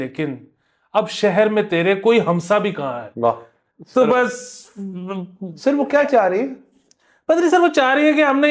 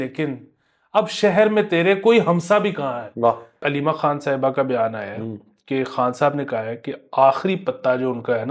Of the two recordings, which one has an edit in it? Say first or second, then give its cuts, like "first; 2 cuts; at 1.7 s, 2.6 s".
second; 1 cut; at 3.6 s